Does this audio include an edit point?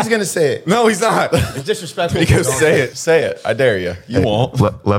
yes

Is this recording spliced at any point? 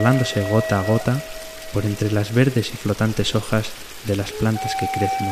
yes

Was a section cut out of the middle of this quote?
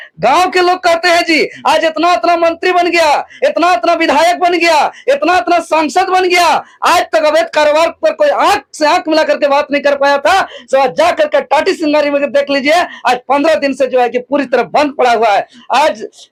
no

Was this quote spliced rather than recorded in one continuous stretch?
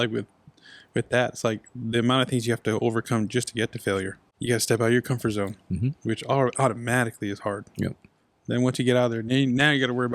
yes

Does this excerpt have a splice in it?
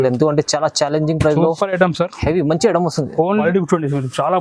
yes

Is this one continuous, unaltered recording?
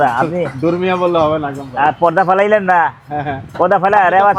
yes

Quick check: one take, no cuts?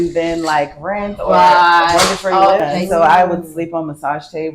no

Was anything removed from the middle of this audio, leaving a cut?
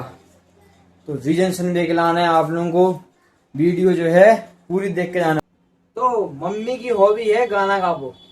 yes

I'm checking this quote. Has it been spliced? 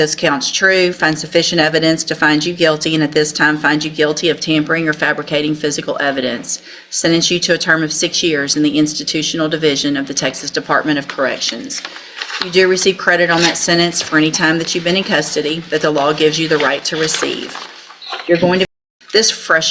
yes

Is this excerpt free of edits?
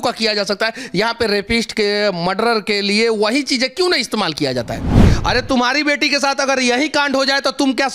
no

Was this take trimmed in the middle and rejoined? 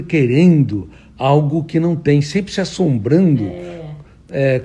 no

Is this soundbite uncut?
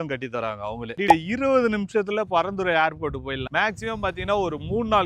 no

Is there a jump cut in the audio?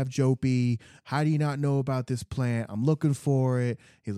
yes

